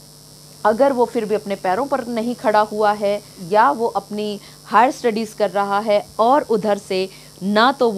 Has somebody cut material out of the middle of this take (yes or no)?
yes